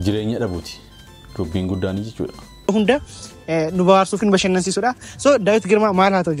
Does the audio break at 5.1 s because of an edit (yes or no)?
no